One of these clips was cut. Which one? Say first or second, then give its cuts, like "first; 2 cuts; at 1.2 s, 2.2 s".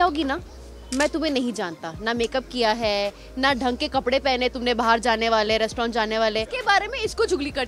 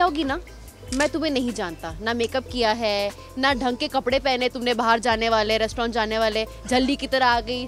first; 1 cut; at 6.5 s